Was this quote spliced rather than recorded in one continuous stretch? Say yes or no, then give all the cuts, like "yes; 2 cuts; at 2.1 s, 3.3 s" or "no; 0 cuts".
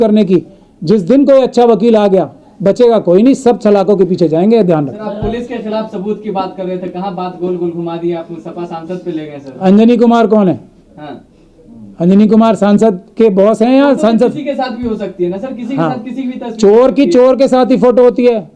no; 0 cuts